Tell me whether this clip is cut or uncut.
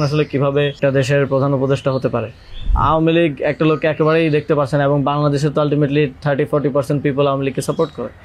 cut